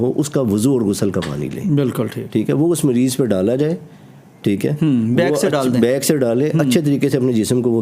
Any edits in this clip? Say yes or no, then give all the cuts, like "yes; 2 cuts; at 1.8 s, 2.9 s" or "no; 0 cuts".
no; 0 cuts